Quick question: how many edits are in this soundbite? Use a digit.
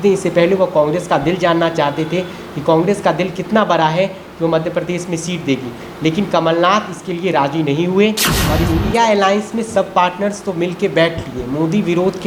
1